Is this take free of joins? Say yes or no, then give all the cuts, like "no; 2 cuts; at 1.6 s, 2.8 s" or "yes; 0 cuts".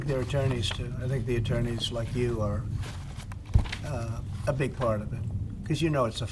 yes; 0 cuts